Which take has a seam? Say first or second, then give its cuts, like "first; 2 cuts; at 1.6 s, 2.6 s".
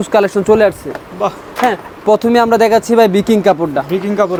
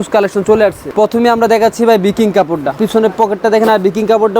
second; 2 cuts; at 0.8 s, 2.8 s